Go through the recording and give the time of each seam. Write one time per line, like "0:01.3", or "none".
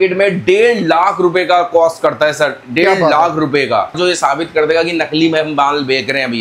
0:03.9